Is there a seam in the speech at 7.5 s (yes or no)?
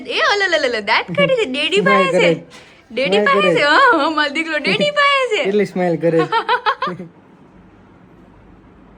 yes